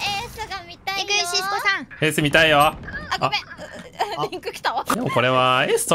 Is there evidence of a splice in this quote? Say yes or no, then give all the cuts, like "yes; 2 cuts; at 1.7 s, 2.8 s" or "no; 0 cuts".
yes; 2 cuts; at 1.9 s, 4.9 s